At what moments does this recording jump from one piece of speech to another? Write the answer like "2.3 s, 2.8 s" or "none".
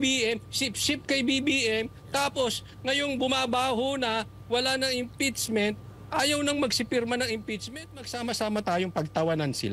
7.7 s